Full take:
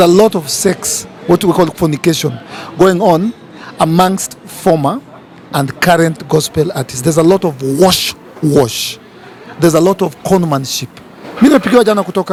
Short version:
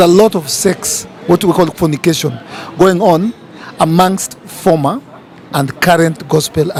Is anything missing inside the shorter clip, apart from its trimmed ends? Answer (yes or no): no